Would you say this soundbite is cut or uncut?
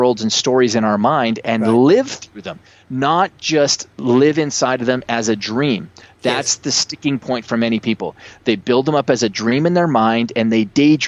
uncut